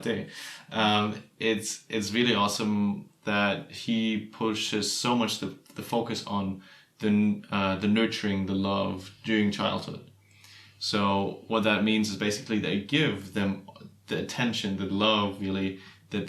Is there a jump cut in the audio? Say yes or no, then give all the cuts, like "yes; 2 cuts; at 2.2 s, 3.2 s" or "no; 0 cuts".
no; 0 cuts